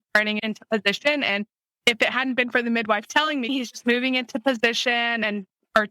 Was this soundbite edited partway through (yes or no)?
yes